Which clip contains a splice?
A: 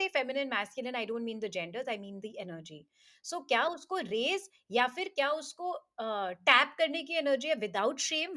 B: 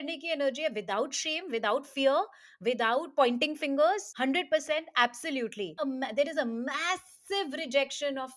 B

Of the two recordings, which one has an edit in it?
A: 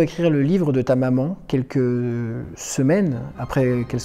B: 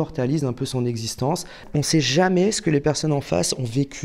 B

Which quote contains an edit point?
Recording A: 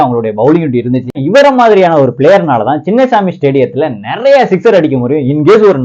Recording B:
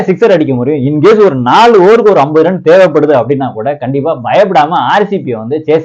A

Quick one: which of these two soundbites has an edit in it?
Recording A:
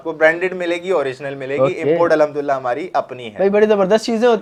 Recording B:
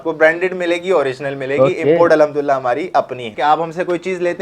B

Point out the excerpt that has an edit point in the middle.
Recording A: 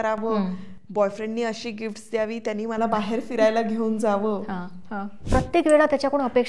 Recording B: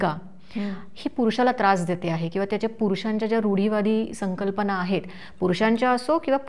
A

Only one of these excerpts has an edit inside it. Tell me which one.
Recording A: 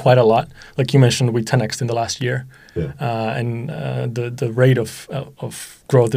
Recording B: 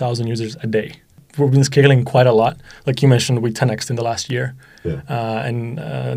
B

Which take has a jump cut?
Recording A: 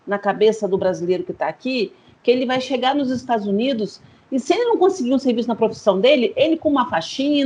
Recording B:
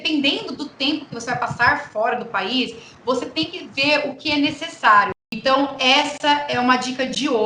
B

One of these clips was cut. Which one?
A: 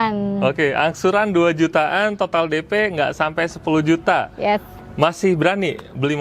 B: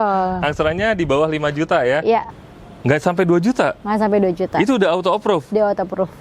B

